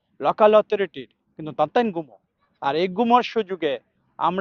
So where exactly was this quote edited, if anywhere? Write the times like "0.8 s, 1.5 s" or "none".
none